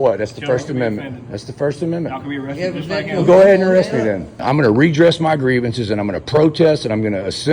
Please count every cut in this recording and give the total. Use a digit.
1